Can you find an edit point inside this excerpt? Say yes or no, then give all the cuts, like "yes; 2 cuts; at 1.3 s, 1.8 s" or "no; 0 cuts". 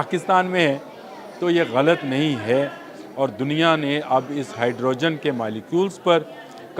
no; 0 cuts